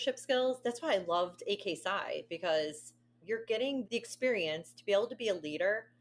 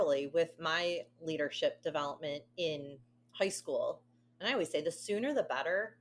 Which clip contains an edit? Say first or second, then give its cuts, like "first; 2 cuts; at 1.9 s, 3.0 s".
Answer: first; 2 cuts; at 3.2 s, 3.8 s